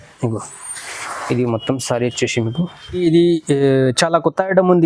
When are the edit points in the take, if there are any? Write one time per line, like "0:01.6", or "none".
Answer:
0:03.0